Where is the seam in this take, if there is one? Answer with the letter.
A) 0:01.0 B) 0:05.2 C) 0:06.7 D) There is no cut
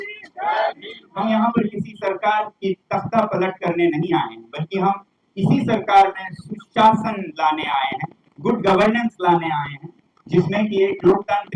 A